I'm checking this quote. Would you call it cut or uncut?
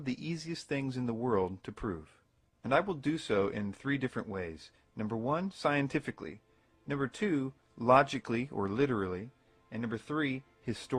uncut